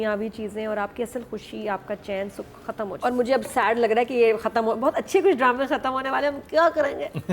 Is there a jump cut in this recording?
yes; 1 cut; at 3.0 s

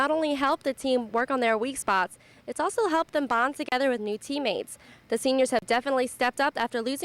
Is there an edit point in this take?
no; 0 cuts

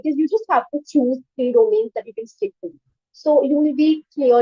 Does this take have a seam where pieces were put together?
no; 0 cuts

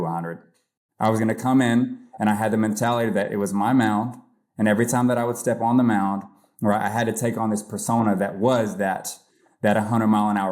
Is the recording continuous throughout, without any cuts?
yes; 0 cuts

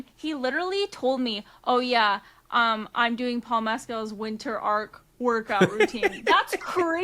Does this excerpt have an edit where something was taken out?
no; 0 cuts

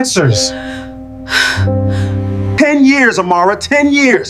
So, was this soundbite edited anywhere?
no; 0 cuts

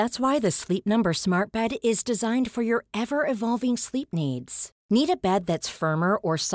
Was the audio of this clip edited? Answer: no; 0 cuts

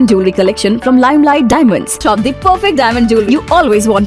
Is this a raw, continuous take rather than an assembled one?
yes; 0 cuts

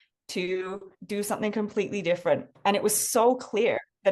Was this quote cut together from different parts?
yes; 2 cuts; at 0.9 s, 2.5 s

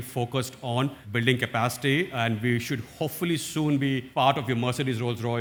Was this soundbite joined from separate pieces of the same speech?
no; 0 cuts

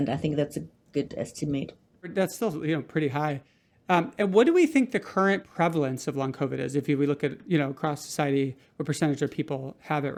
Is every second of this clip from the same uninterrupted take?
yes; 0 cuts

